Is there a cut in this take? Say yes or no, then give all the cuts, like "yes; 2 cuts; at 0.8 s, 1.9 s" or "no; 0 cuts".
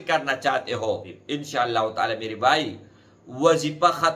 yes; 1 cut; at 1.1 s